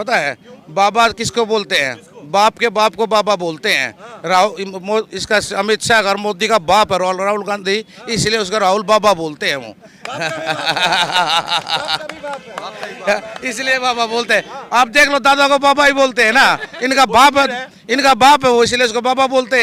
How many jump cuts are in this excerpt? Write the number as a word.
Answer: zero